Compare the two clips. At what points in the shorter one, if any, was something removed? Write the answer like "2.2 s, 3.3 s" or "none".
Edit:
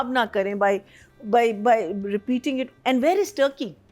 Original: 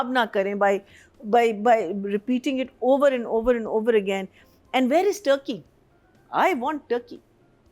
2.7 s